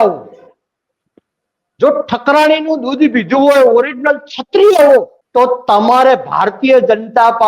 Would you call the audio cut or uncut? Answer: cut